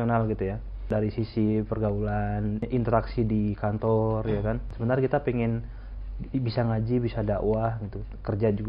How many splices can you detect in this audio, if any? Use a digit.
3